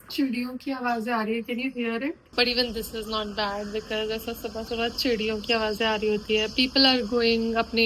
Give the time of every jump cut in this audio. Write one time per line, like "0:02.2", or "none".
0:02.3

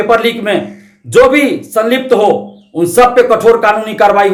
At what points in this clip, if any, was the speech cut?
none

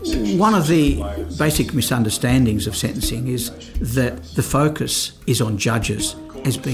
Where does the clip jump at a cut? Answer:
0:01.2
0:05.1

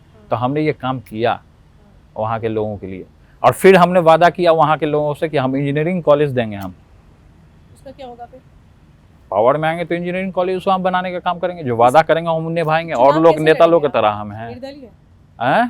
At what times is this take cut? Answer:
none

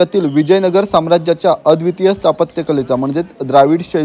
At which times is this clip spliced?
none

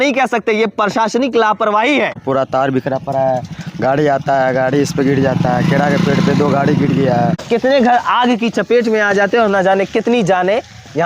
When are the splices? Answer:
0:02.2
0:07.4

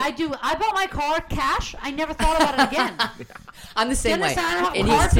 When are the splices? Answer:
none

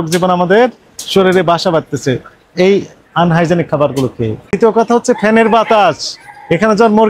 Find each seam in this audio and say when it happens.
0:04.4

